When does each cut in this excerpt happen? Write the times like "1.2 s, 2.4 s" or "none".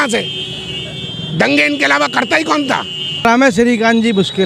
3.2 s